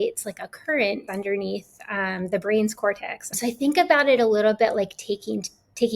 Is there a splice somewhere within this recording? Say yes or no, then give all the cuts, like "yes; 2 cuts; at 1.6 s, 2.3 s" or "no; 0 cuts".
yes; 2 cuts; at 1.0 s, 3.3 s